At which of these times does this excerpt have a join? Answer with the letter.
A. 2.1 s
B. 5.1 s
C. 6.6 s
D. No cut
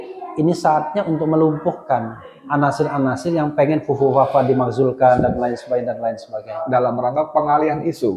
C